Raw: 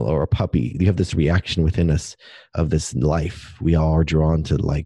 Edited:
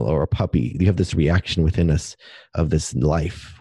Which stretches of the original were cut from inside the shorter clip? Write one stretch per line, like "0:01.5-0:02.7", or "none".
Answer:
none